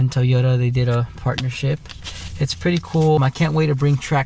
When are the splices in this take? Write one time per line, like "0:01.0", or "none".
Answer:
0:03.2